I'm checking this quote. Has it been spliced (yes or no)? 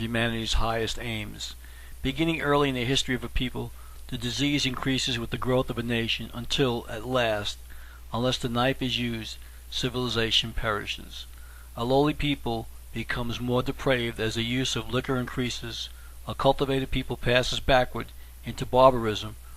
yes